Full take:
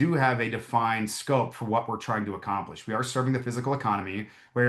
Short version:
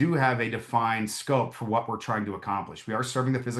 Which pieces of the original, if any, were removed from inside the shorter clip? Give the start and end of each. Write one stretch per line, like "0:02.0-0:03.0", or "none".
none